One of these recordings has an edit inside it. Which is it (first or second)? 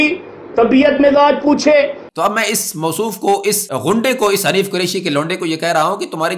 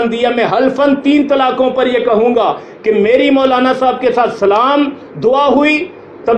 first